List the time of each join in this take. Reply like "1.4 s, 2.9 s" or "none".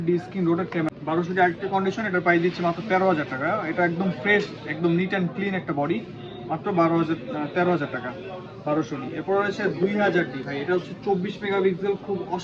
none